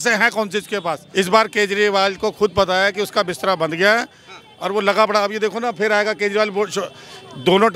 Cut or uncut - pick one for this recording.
cut